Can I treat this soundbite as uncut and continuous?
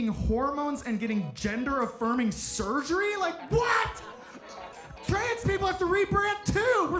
yes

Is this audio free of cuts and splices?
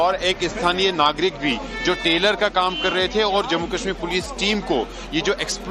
yes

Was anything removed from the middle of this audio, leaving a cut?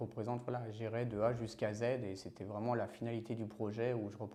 no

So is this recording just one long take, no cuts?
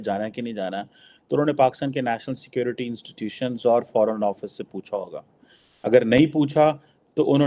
yes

